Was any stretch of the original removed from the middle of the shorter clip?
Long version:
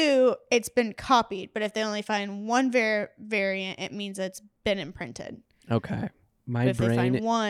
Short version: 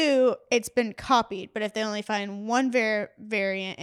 no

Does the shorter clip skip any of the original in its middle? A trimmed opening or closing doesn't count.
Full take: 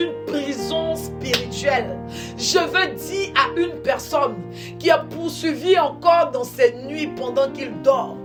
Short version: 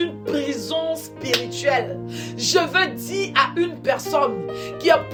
no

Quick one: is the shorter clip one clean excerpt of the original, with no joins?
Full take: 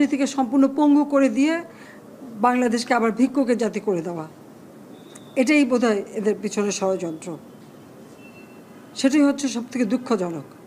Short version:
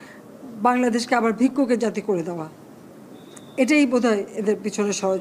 yes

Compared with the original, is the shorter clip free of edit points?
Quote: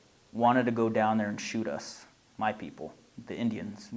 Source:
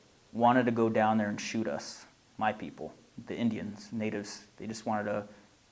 yes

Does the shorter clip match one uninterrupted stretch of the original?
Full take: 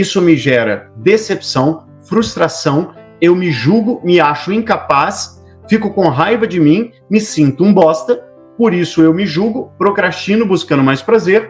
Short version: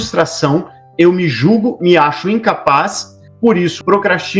no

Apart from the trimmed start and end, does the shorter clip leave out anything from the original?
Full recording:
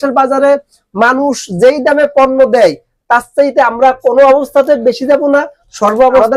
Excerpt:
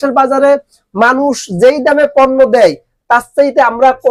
no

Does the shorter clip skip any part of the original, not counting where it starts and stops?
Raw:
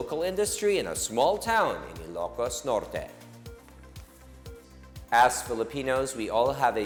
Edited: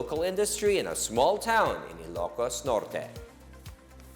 yes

